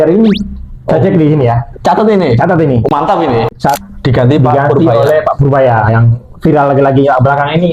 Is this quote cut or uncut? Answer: cut